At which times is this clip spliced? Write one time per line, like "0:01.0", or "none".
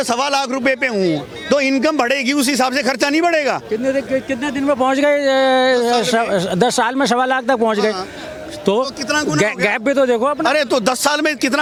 none